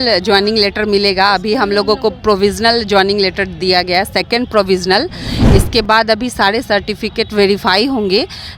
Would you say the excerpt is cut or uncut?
uncut